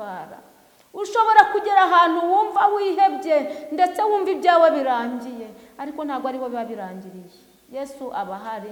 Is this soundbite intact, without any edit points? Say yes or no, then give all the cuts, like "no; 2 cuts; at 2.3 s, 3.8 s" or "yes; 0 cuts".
yes; 0 cuts